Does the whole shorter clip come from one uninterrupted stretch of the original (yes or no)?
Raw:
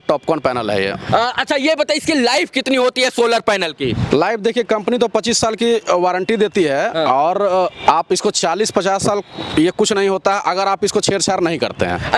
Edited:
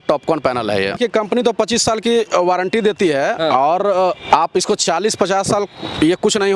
no